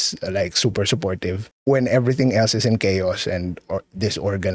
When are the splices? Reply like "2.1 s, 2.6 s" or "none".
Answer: none